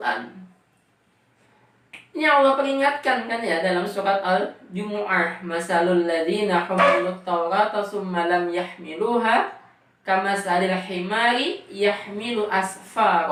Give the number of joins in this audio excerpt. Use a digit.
0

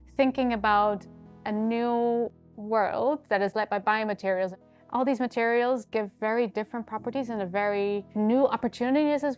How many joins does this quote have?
2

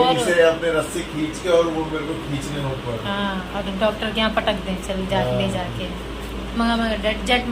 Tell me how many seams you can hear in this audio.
0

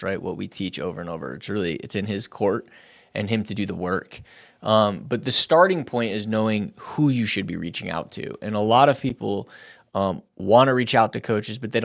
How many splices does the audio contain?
0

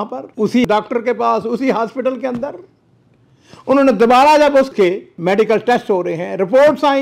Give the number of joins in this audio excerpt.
1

